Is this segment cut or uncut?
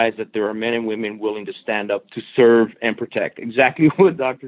uncut